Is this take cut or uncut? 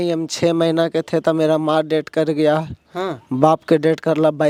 uncut